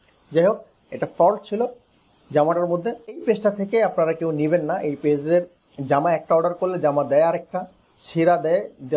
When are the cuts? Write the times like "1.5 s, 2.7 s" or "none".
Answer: 3.1 s